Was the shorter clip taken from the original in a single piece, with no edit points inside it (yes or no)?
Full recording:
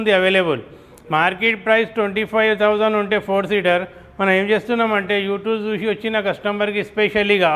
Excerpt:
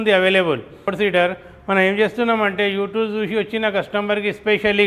no